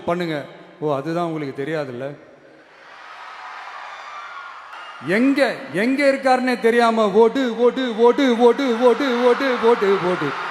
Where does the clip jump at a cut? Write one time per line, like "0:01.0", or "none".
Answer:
0:04.8